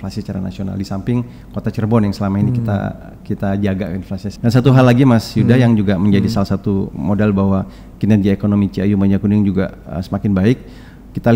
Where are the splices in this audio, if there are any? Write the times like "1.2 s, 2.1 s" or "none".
4.3 s